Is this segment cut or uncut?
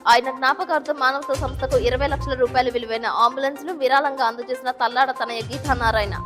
uncut